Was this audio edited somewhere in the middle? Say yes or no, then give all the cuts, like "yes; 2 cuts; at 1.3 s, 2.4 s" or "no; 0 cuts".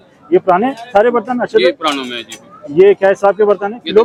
no; 0 cuts